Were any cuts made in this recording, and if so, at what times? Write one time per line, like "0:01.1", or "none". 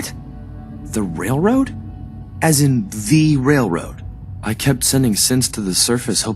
0:04.2